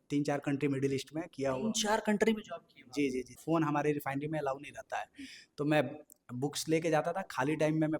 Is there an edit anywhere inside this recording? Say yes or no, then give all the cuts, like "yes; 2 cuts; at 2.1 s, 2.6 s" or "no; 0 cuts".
yes; 1 cut; at 3.4 s